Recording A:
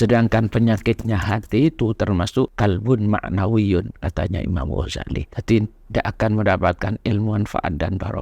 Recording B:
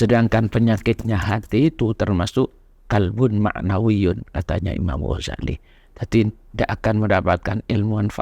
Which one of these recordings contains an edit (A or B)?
A